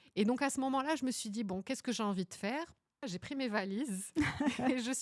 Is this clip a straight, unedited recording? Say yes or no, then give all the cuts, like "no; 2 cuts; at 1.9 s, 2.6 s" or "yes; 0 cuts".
no; 1 cut; at 3.1 s